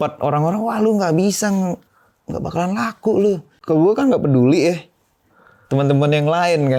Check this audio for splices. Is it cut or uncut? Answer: cut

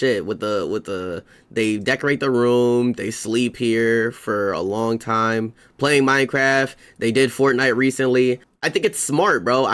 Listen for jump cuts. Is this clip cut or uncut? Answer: cut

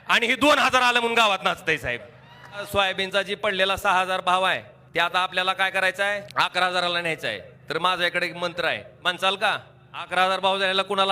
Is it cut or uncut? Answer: cut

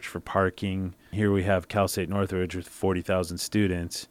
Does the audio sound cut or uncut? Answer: cut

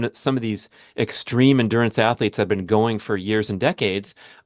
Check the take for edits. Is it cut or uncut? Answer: uncut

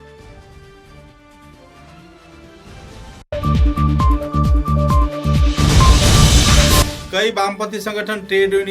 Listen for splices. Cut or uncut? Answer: cut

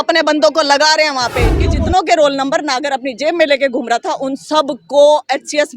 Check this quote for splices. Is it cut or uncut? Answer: cut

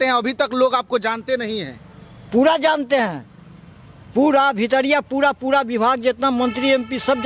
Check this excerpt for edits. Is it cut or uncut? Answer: uncut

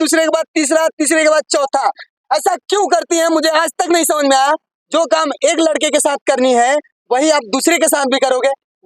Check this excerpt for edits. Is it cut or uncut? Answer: uncut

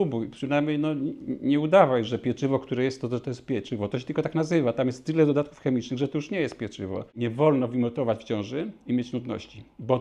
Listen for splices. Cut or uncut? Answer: cut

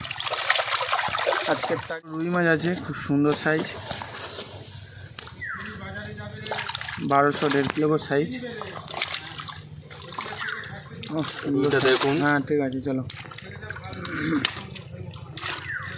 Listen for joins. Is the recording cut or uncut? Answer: cut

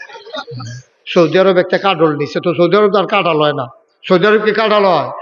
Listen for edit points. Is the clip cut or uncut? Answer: cut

